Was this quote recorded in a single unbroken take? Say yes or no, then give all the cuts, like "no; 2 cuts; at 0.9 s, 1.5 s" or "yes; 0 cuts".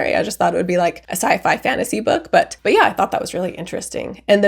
yes; 0 cuts